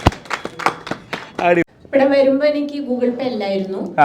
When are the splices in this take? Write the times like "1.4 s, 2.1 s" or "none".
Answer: 1.7 s

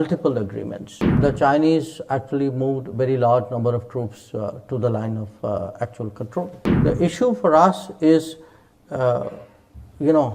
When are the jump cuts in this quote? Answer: 1.1 s, 6.6 s

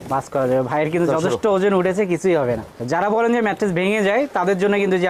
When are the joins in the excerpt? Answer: none

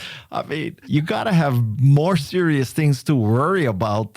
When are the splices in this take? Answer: 0.8 s, 1.7 s

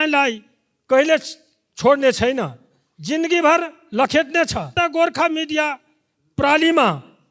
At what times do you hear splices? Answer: 4.8 s

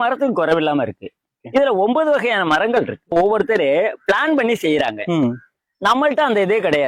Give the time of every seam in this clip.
3.1 s

